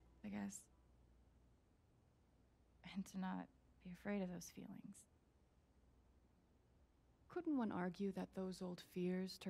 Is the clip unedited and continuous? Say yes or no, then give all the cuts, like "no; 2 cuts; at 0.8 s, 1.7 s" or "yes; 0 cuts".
yes; 0 cuts